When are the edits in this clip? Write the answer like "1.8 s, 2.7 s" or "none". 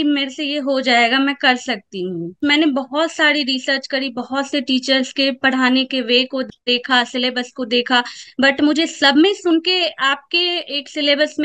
2.4 s